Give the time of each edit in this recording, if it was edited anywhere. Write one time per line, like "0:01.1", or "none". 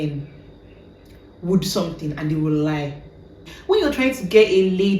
0:03.5